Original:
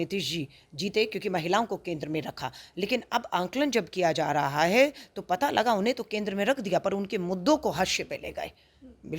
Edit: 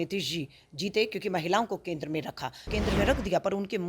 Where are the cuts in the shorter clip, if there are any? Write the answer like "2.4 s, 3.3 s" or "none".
2.6 s